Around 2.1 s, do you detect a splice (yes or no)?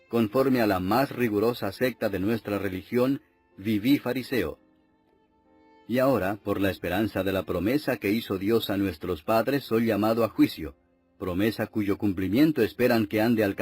no